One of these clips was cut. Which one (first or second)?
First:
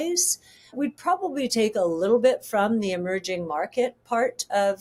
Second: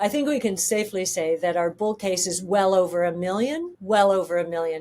second